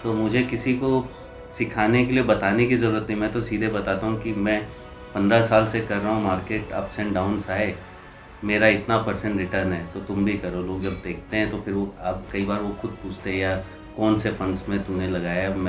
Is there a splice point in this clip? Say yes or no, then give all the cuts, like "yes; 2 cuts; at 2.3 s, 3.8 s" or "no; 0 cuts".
no; 0 cuts